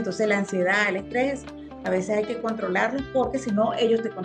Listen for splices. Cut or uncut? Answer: uncut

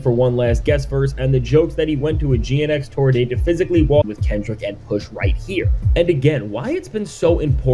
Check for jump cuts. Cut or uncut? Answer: cut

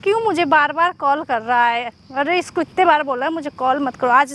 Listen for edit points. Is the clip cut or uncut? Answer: uncut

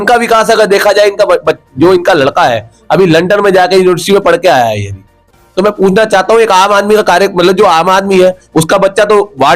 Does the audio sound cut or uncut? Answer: uncut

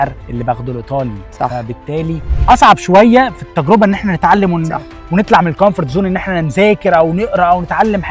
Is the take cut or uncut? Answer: cut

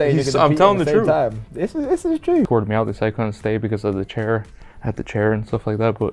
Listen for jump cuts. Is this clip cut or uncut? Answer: cut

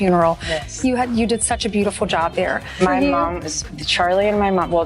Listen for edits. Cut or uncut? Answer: cut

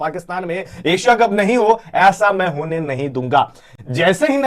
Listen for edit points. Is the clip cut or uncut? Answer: uncut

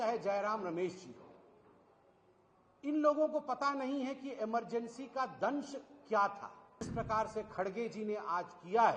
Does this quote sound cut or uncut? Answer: cut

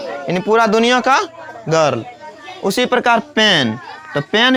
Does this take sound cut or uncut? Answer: uncut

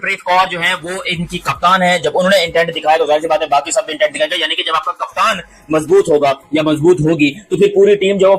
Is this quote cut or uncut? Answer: uncut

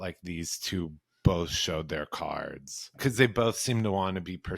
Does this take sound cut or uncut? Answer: cut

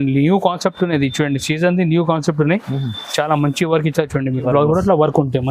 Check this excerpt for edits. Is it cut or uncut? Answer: cut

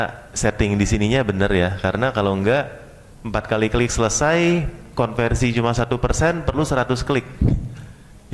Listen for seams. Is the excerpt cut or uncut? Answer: uncut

